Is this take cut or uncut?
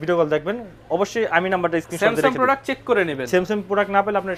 uncut